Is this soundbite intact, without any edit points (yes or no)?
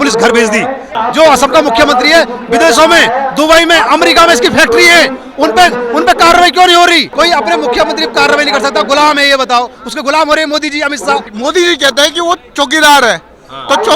no